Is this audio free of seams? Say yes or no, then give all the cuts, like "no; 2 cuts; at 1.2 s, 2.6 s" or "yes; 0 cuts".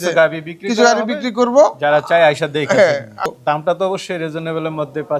no; 1 cut; at 3.2 s